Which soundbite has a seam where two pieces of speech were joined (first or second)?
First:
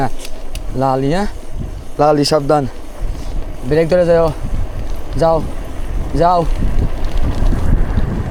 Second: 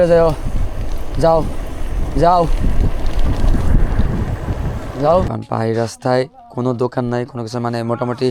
second